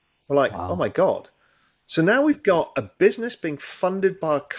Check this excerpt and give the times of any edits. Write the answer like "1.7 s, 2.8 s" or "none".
none